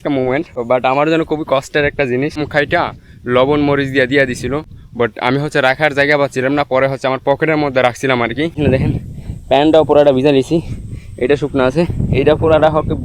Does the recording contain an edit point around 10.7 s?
no; 2 cuts; at 2.4 s, 8.6 s

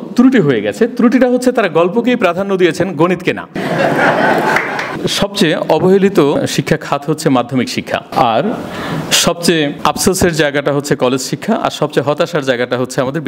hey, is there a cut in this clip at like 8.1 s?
yes; 5 cuts; at 3.5 s, 4.9 s, 6.4 s, 8.1 s, 9.7 s

